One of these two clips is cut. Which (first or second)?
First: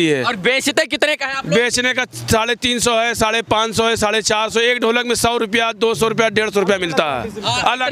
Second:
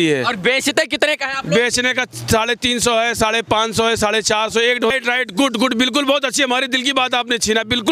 second